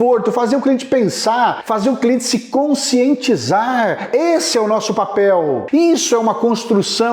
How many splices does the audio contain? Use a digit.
2